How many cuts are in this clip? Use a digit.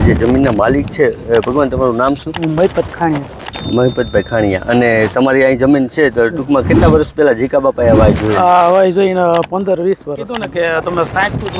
1